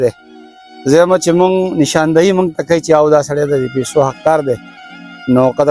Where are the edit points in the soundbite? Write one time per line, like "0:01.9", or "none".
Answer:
none